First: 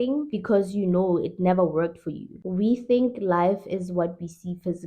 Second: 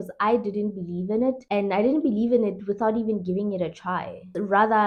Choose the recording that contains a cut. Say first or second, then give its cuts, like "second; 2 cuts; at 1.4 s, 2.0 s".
first; 1 cut; at 2.3 s